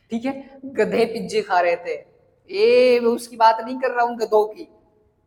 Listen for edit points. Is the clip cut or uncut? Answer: uncut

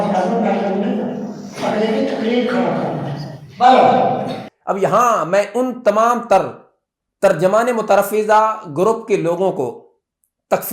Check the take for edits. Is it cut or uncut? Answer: uncut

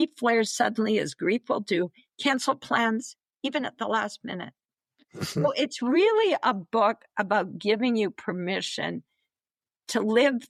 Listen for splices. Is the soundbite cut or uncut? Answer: uncut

